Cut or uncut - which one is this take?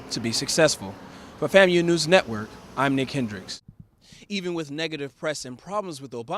cut